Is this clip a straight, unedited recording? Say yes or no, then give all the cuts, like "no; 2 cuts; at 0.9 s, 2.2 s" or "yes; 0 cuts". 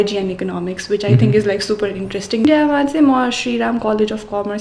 no; 1 cut; at 2.4 s